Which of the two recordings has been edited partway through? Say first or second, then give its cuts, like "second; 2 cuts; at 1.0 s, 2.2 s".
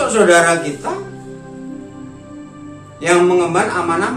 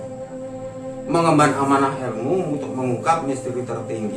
first; 2 cuts; at 1.1 s, 3.0 s